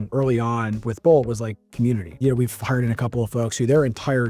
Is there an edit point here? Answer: yes; 1 cut; at 2.1 s

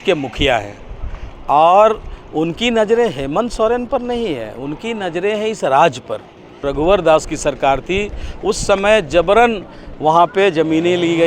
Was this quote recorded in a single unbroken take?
no; 1 cut; at 6.6 s

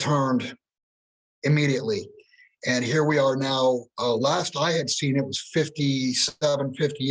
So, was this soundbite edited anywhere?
no; 0 cuts

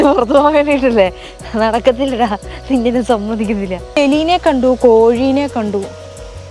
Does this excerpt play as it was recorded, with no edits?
no; 1 cut; at 4.0 s

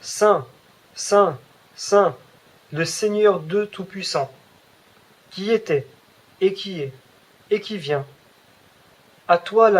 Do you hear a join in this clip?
no; 0 cuts

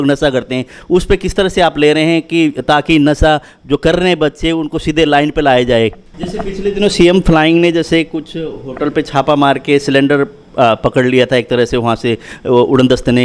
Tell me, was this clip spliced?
yes; 1 cut; at 6.0 s

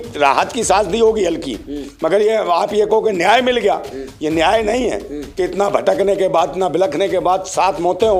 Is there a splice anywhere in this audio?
no; 0 cuts

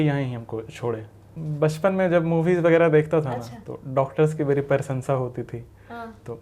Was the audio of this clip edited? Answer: yes; 1 cut; at 1.3 s

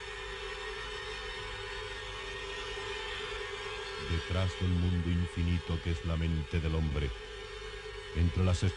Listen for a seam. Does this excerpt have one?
yes; 1 cut; at 4.3 s

